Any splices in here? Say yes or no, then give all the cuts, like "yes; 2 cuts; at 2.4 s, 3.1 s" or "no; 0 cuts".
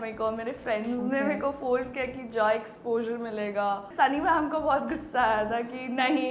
yes; 1 cut; at 3.9 s